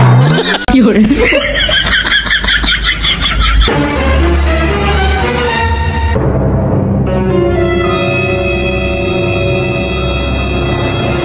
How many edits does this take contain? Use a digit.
0